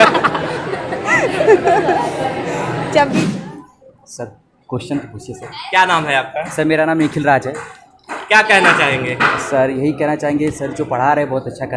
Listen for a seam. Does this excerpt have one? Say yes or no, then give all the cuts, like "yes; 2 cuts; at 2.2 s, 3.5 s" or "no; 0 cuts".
yes; 1 cut; at 3.3 s